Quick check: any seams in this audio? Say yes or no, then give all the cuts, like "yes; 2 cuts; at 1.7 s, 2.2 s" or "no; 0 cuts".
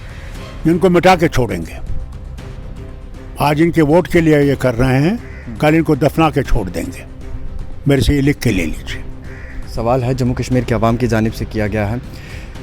yes; 1 cut; at 9.7 s